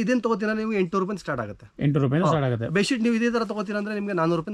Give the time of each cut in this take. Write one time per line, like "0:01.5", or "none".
none

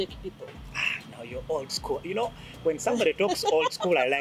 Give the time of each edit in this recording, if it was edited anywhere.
none

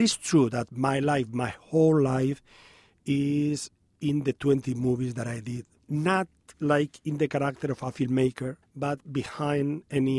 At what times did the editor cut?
0:05.8
0:06.4
0:08.6

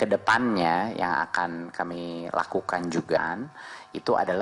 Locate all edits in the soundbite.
0:03.2

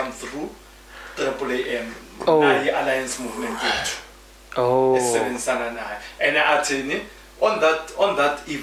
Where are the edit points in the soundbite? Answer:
none

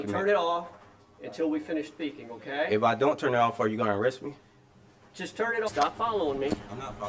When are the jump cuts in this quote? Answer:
0:03.4
0:05.7

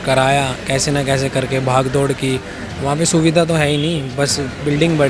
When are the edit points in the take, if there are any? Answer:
none

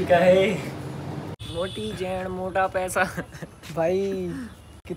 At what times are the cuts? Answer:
0:01.0

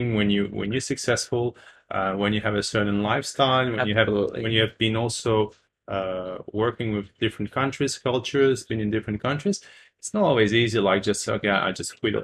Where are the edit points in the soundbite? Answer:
none

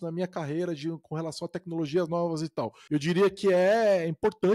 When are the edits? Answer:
0:02.8

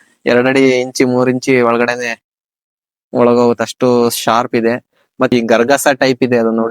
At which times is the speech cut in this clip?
0:05.3

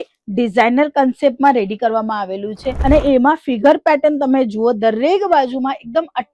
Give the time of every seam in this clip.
0:02.7

